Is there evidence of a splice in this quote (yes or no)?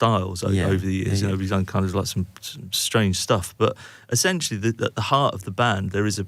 no